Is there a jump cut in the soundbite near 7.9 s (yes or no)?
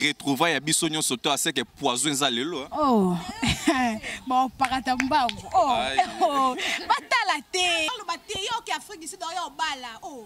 yes